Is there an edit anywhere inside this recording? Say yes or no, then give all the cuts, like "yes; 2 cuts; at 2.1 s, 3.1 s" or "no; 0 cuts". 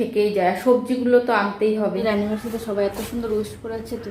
yes; 1 cut; at 2.0 s